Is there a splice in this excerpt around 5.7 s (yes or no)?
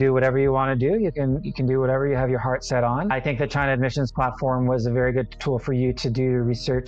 no